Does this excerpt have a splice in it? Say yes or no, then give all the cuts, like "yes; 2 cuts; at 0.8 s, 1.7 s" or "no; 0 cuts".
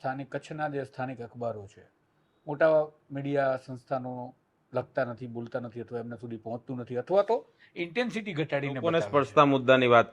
yes; 1 cut; at 8.9 s